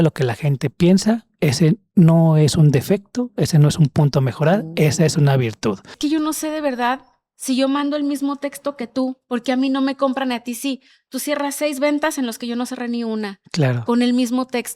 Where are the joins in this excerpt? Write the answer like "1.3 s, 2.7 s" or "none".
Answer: 5.9 s